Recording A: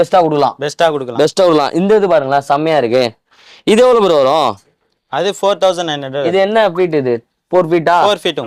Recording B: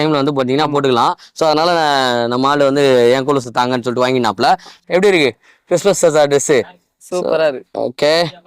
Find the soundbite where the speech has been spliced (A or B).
B